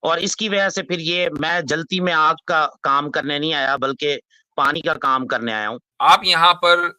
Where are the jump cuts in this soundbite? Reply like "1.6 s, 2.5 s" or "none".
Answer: 5.8 s